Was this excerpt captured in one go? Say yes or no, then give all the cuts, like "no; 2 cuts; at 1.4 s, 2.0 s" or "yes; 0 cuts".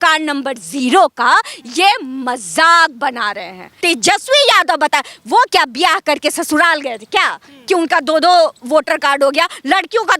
no; 1 cut; at 3.7 s